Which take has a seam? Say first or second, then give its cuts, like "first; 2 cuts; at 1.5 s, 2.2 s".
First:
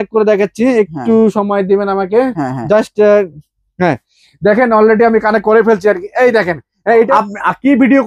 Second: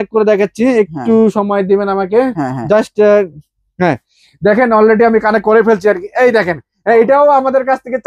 first; 1 cut; at 7.1 s